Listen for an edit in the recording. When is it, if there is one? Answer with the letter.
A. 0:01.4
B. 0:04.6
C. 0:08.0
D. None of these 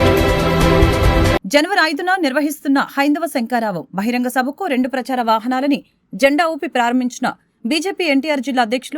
A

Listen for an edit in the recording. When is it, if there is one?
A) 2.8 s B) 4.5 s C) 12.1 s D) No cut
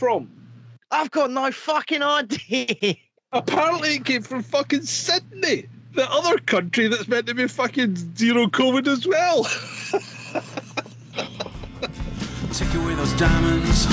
C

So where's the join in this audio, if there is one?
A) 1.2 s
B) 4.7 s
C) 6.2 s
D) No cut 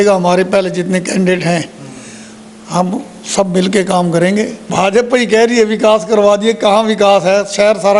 B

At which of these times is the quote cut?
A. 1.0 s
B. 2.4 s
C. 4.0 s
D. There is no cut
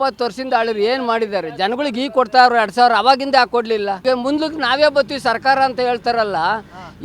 C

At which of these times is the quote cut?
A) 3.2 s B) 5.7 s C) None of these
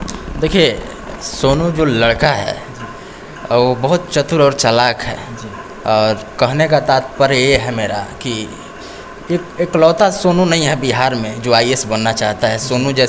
C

